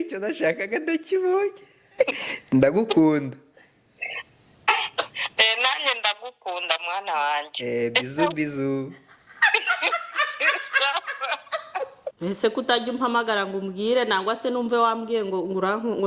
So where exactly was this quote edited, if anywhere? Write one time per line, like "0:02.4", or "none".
0:02.2
0:12.0